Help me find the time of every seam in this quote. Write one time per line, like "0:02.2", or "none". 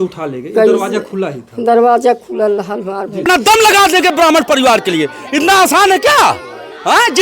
0:03.3